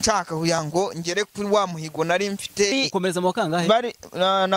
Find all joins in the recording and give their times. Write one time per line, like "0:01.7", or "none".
0:02.7